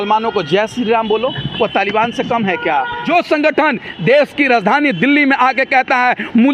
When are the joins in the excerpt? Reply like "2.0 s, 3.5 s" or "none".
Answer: 3.0 s